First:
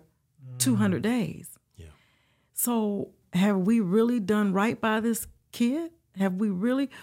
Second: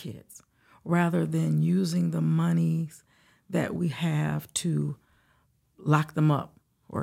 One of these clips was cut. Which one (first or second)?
first